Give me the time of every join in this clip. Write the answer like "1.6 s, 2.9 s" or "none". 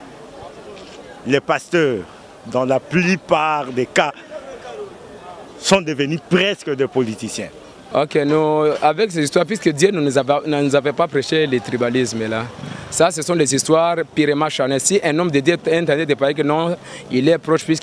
7.7 s